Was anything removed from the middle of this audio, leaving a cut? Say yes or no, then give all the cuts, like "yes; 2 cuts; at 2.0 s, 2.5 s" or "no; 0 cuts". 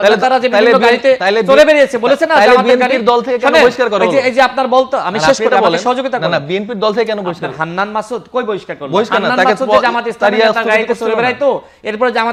no; 0 cuts